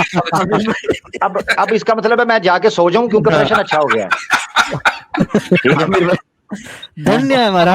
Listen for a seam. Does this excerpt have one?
no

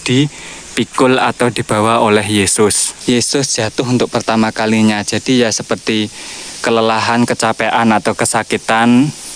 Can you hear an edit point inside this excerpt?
yes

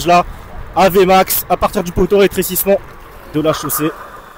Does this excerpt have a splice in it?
no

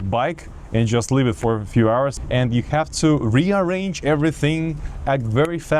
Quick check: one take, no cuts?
no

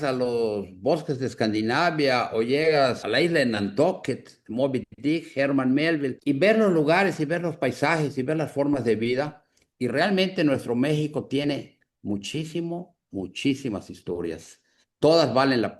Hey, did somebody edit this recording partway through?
yes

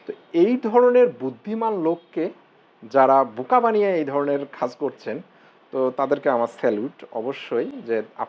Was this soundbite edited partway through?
yes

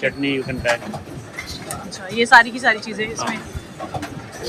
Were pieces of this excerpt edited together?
no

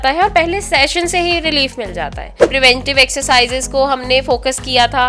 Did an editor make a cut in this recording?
yes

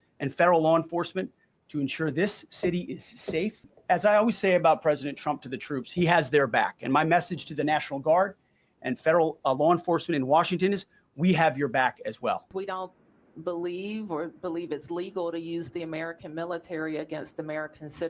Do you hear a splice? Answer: yes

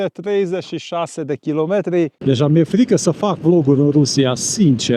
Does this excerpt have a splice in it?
yes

